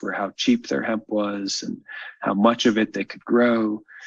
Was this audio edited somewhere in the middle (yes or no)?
no